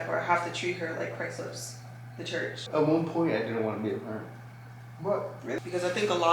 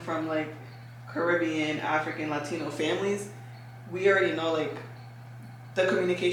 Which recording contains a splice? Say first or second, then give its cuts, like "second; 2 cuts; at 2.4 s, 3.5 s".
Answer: first; 2 cuts; at 2.6 s, 5.6 s